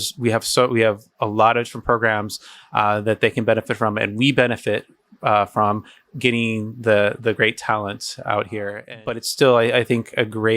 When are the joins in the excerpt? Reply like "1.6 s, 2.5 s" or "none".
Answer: 9.3 s